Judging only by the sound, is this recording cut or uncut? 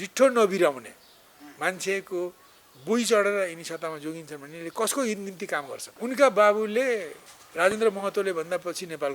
cut